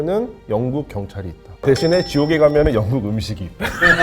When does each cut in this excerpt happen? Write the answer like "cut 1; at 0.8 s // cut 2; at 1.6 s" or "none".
cut 1; at 1.6 s